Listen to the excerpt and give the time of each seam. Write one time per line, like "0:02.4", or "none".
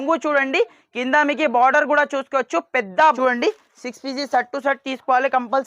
0:03.1